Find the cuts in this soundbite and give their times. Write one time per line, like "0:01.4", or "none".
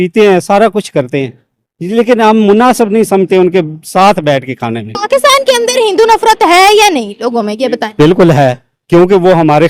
0:05.0